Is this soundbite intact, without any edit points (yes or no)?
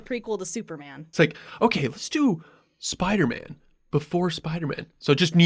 no